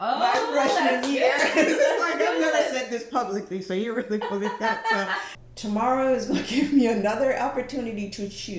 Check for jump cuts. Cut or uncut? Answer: cut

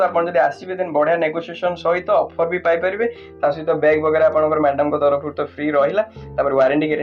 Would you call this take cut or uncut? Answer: uncut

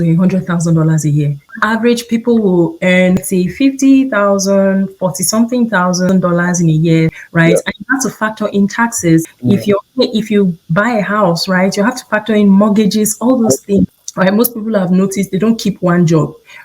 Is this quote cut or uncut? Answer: cut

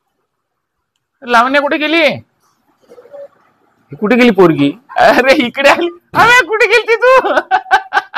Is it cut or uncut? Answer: uncut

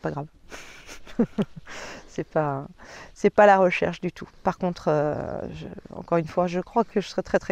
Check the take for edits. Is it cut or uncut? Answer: uncut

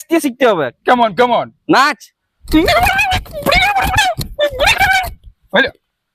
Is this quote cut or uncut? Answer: uncut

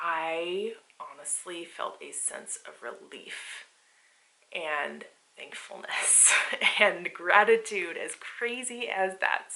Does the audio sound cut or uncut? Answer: uncut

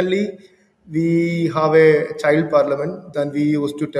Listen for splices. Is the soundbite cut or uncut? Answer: cut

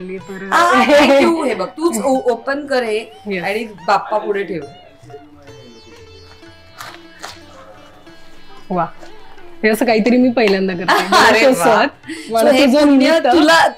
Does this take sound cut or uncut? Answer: uncut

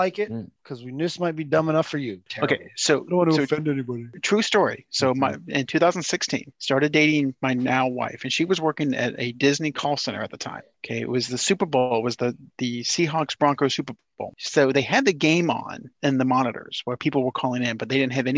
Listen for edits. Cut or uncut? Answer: cut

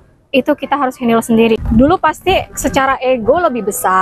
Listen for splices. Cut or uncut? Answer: cut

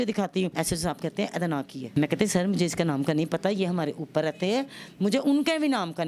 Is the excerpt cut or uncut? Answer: uncut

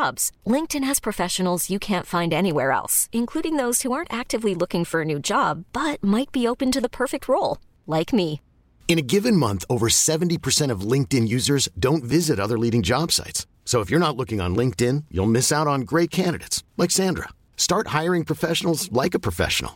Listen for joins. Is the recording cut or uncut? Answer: uncut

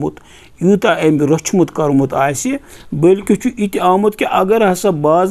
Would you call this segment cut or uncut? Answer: uncut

